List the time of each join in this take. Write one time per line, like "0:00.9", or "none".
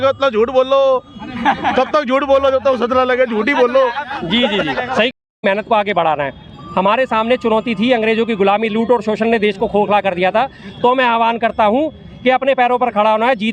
0:05.3